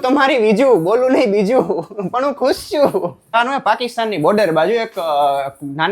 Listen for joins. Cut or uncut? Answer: cut